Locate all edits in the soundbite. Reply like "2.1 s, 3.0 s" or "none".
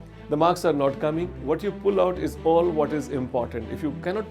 1.3 s